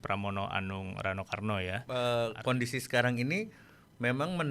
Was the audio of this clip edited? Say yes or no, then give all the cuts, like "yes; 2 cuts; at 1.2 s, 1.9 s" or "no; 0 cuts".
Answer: yes; 1 cut; at 1.8 s